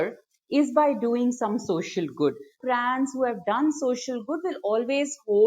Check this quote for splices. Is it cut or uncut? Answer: cut